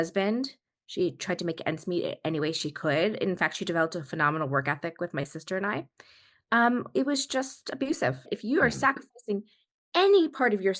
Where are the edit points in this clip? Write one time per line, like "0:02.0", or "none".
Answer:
0:08.3